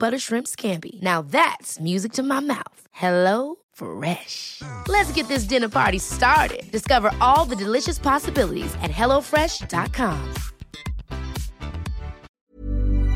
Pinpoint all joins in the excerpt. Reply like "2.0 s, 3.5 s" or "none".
12.2 s

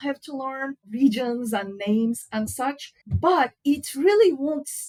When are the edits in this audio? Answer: none

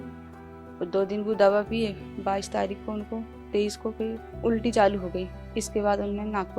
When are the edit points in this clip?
4.3 s, 5.4 s

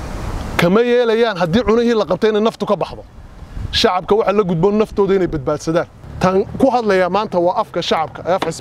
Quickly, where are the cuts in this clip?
6.0 s

